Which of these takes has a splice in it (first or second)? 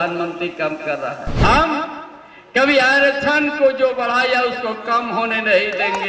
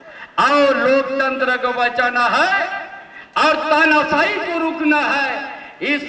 first